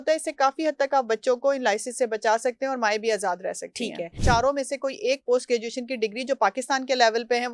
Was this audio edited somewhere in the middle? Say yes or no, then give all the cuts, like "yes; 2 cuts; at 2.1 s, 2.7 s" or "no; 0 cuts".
yes; 1 cut; at 4.1 s